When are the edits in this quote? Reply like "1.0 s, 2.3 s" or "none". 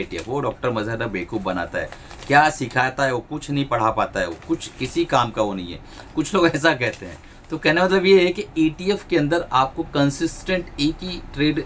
none